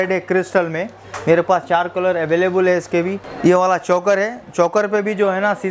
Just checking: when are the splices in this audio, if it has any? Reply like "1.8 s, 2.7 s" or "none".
1.0 s, 3.2 s